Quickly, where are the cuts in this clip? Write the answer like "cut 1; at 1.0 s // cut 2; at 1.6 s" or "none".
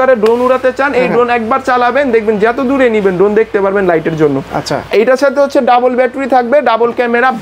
none